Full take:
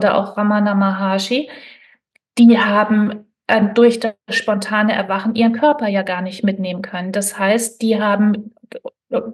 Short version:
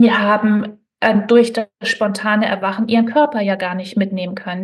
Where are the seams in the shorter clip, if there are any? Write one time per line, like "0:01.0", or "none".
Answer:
none